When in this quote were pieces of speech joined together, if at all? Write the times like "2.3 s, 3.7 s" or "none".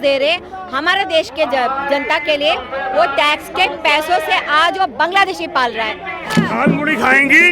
6.3 s